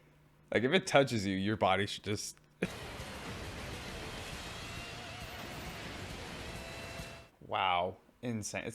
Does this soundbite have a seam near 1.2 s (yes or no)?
no